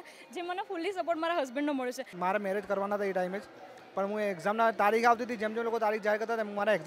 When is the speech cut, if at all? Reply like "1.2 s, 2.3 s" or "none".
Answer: 2.1 s